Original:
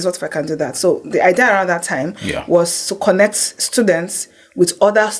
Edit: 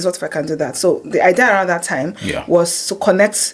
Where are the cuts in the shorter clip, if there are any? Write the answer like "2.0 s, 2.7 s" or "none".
none